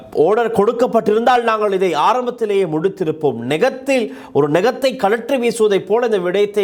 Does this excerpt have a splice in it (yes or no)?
no